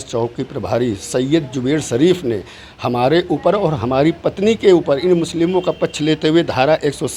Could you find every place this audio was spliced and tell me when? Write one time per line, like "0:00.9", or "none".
none